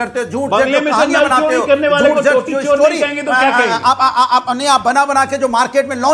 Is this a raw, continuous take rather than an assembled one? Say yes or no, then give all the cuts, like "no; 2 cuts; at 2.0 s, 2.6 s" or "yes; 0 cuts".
yes; 0 cuts